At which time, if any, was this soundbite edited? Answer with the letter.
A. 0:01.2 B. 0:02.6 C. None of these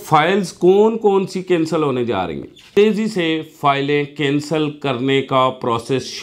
B